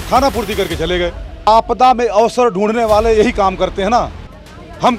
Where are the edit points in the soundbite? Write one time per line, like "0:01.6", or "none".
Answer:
0:01.5